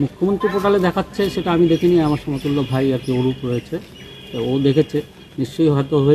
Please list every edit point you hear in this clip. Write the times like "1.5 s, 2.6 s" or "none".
none